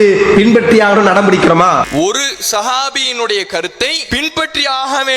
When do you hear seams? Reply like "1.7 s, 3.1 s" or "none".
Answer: 4.0 s